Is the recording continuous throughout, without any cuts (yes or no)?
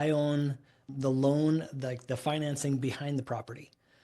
no